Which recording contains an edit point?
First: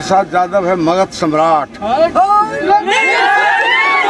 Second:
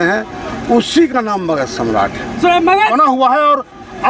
second; 1 cut; at 2.9 s

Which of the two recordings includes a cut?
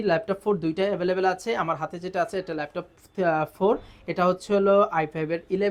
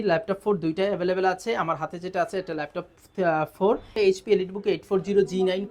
second; 1 cut; at 3.9 s

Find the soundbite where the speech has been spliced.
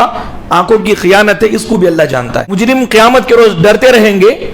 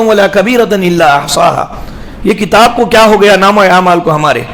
first; 1 cut; at 2.5 s

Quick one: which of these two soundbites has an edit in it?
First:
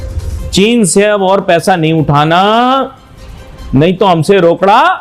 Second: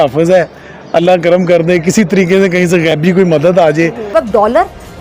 second; 1 cut; at 4.1 s

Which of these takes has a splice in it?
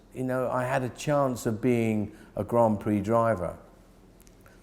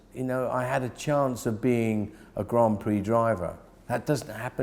second; 1 cut; at 3.7 s

